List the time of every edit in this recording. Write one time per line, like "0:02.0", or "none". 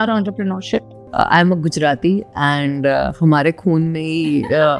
0:01.0